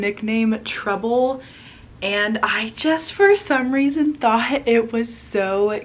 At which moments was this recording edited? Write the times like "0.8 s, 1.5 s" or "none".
none